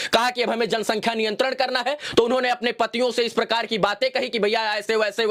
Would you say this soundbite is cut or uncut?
uncut